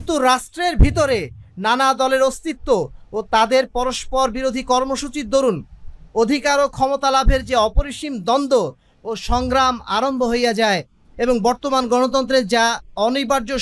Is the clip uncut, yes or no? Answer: yes